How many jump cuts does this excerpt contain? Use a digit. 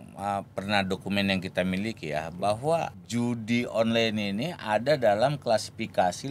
1